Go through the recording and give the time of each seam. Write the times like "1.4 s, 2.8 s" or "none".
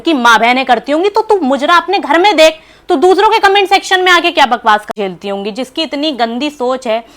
4.9 s